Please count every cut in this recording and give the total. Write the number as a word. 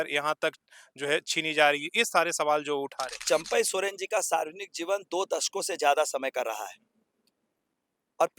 one